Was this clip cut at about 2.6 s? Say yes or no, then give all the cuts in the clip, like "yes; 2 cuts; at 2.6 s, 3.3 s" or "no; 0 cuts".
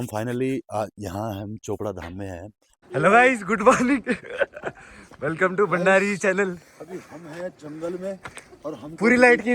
yes; 1 cut; at 2.6 s